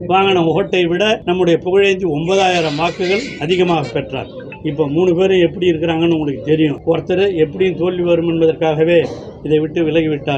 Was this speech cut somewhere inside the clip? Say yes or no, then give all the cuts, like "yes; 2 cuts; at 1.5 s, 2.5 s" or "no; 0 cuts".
yes; 2 cuts; at 1.2 s, 6.8 s